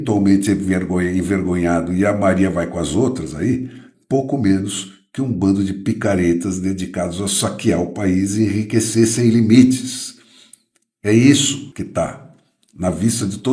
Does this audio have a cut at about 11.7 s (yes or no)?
yes